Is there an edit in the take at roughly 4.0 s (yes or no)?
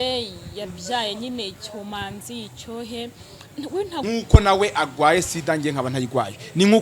yes